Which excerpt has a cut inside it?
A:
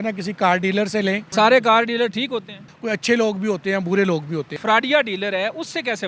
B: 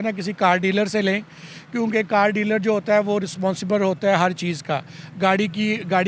A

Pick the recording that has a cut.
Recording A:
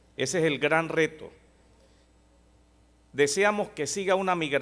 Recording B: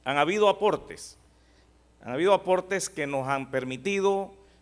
A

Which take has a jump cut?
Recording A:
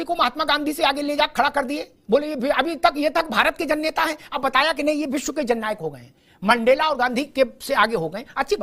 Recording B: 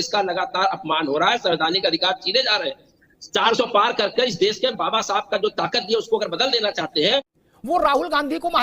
B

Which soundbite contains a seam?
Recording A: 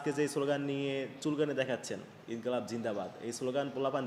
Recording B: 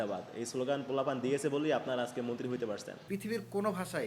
B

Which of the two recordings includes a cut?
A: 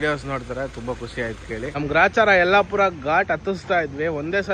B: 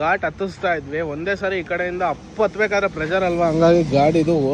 A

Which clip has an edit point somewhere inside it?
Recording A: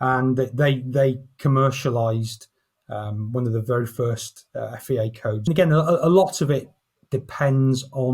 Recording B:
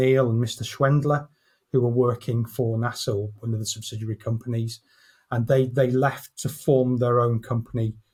A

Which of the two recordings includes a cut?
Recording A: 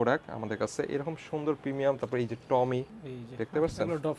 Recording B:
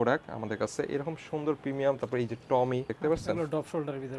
B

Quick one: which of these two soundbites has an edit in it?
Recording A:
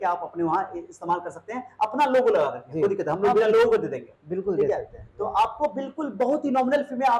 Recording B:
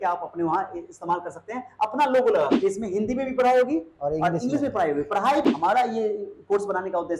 B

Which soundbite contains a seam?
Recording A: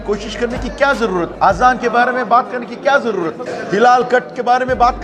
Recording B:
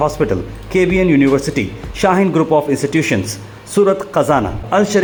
A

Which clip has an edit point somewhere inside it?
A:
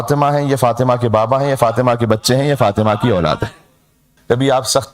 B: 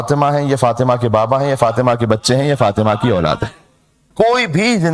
A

